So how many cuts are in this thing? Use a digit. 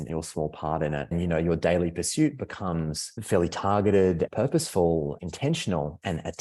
4